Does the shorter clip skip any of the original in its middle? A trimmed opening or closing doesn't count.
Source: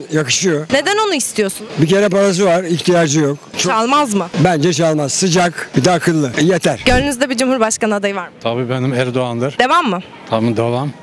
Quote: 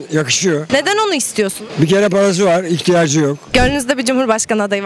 yes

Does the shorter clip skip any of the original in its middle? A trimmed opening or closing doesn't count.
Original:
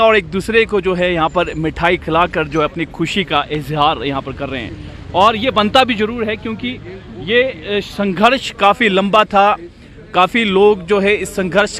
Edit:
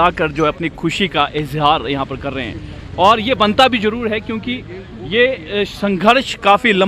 no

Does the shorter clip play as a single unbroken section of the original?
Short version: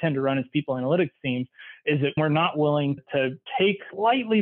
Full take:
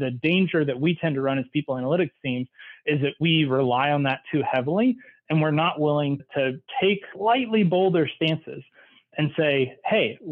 no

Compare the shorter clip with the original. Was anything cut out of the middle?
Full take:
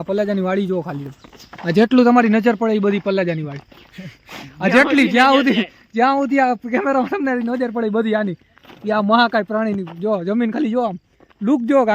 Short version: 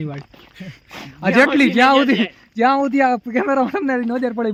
no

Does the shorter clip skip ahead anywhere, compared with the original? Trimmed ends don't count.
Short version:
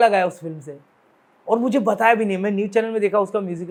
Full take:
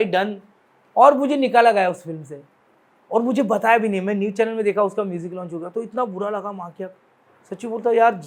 no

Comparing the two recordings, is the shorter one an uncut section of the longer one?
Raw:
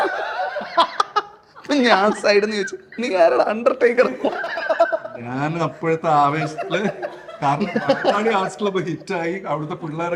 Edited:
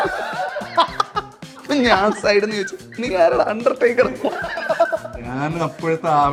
yes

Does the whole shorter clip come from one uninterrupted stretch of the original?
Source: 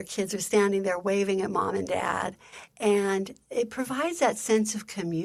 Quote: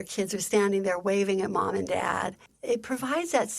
no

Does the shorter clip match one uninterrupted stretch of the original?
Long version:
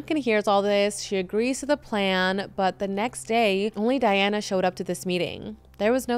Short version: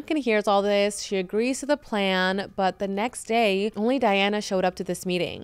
yes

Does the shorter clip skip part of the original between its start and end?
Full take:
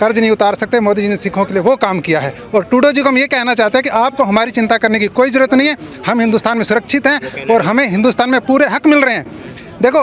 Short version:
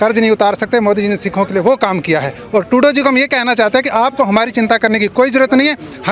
no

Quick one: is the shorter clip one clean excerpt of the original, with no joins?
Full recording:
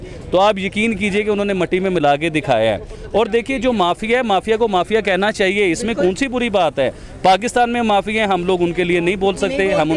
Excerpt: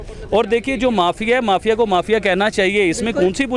yes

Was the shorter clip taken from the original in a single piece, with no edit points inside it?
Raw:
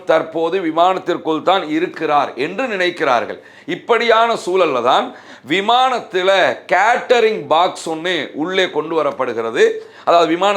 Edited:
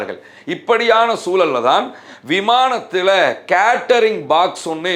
yes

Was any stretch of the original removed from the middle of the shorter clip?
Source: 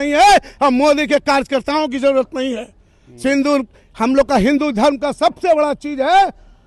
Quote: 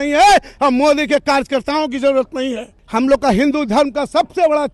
yes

